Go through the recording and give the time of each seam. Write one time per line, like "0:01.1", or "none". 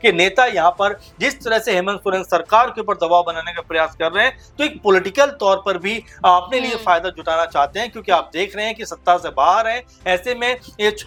none